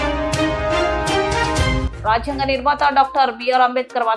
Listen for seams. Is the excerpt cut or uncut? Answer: uncut